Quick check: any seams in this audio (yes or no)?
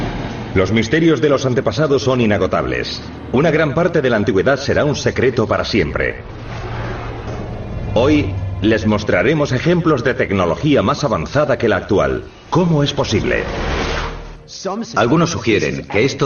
yes